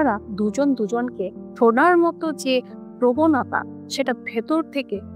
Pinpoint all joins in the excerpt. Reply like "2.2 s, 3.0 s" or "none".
1.4 s

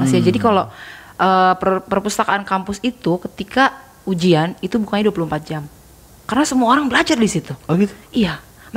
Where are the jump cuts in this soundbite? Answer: none

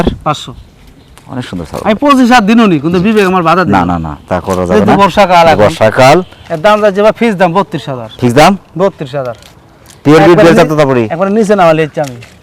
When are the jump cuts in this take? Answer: 6.4 s

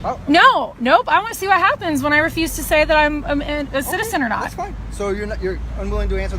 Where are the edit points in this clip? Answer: none

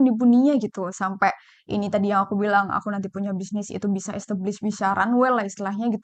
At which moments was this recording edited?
none

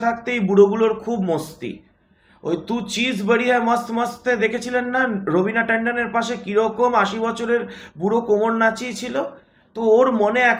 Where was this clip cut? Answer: none

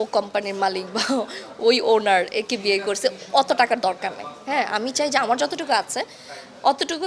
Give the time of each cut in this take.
none

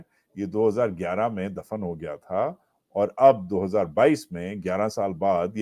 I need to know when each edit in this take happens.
none

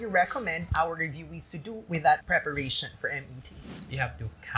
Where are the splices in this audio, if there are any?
2.2 s, 3.7 s

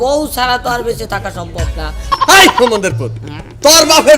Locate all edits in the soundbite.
2.1 s

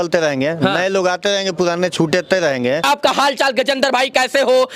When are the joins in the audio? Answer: 2.9 s

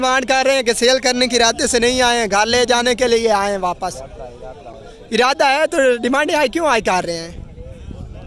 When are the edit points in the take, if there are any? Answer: none

